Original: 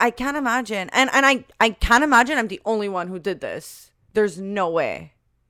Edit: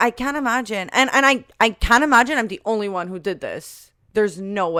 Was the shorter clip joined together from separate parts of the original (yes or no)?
no